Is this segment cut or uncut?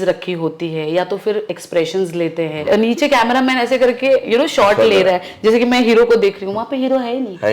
cut